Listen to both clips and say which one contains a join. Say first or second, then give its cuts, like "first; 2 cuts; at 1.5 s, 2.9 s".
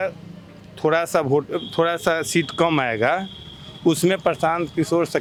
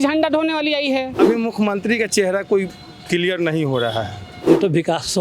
second; 2 cuts; at 1.2 s, 4.3 s